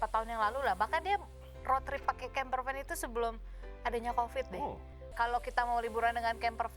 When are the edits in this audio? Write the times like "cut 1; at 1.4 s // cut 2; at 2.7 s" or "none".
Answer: cut 1; at 5.1 s